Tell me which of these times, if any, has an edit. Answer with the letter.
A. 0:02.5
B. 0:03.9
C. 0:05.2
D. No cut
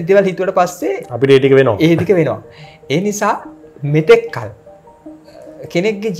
D